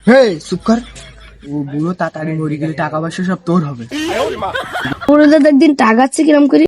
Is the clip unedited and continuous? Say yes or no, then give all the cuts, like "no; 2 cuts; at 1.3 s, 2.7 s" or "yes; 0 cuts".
no; 1 cut; at 4.9 s